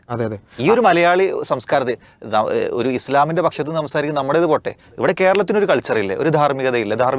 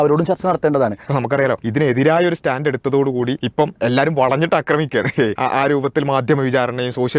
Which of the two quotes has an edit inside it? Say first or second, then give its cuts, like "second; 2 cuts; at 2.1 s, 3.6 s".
second; 3 cuts; at 1.2 s, 3.6 s, 5.4 s